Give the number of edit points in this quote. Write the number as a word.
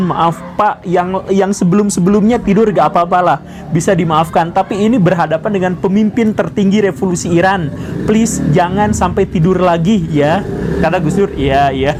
zero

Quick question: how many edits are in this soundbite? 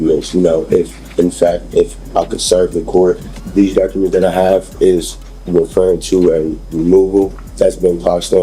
two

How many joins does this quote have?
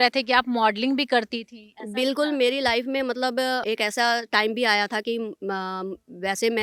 zero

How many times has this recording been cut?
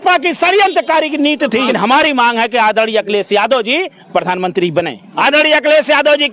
two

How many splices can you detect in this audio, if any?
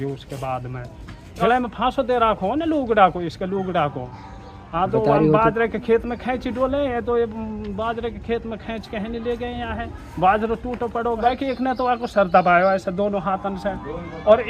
two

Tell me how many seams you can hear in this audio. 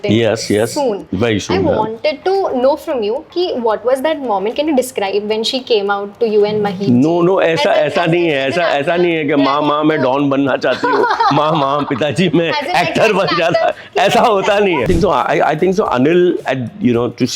one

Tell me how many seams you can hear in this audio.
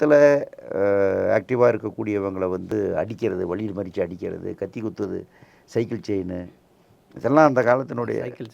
zero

